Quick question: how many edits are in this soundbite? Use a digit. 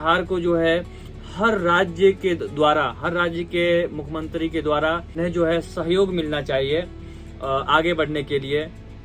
1